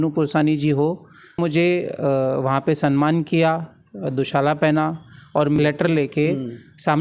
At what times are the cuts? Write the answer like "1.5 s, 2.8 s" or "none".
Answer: 1.4 s, 5.6 s

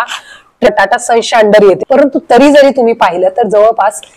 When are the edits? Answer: 0.7 s, 1.8 s

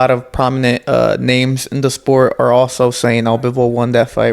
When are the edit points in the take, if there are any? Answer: none

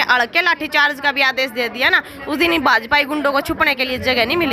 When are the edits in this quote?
none

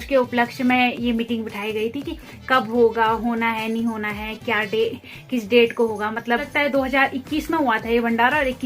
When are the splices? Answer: 6.4 s

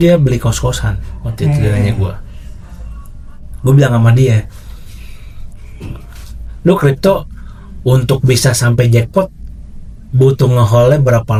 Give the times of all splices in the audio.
none

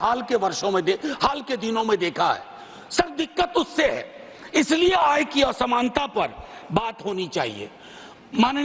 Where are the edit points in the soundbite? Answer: none

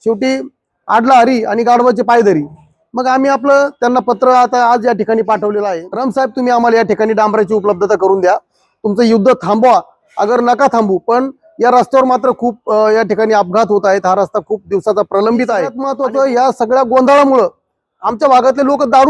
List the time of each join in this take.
5.9 s, 15.8 s

